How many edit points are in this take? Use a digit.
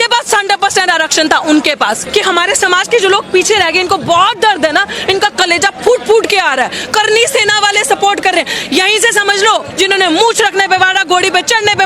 2